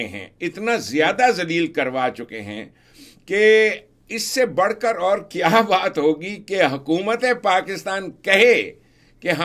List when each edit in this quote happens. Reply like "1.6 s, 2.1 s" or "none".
none